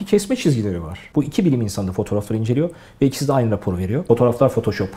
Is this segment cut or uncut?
cut